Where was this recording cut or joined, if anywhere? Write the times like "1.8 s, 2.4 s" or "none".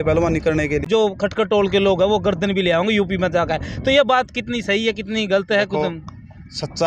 1.1 s

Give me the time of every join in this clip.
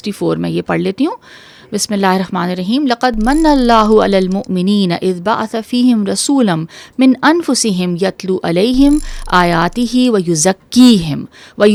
none

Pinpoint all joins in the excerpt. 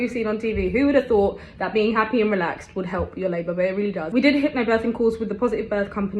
none

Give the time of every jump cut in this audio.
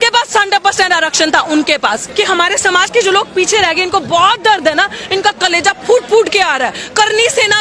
2.0 s

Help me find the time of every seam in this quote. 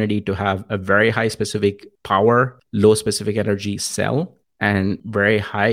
1.9 s, 2.6 s, 4.8 s

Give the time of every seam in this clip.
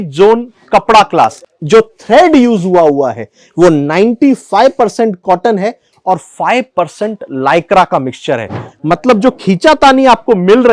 1.5 s, 8.7 s

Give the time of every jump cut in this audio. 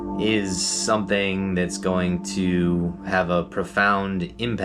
none

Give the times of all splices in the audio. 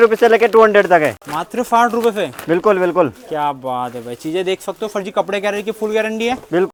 none

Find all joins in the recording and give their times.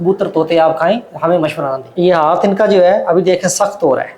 1.8 s

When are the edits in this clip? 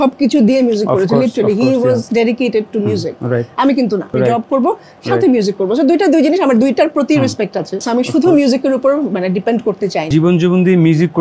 4.1 s, 7.8 s, 10.1 s

